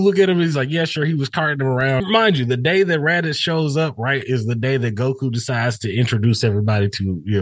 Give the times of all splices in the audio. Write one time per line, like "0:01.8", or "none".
0:02.0